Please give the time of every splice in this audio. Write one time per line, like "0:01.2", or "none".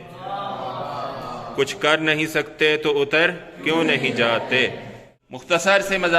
0:05.1

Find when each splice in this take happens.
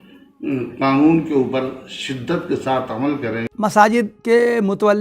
0:03.4
0:04.2

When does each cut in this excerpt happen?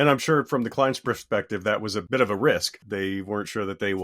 0:02.0
0:02.8

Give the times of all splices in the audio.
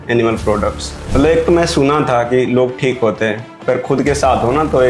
0:01.0

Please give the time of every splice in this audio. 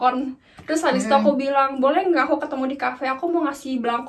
none

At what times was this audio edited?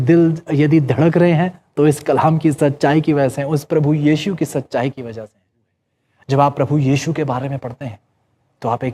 0:05.8

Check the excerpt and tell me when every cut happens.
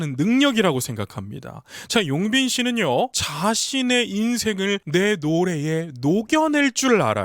none

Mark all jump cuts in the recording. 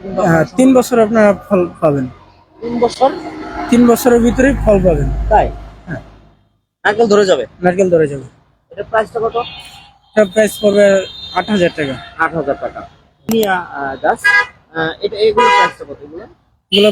0:13.3

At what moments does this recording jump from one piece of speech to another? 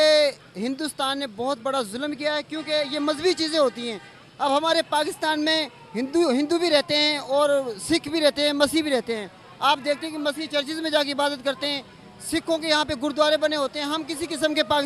none

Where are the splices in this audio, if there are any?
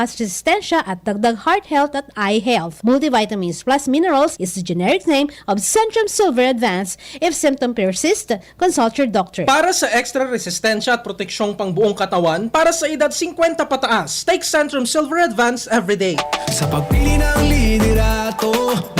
none

